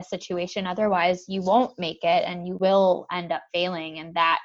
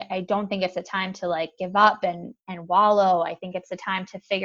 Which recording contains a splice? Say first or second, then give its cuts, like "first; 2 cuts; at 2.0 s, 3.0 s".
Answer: first; 1 cut; at 2.5 s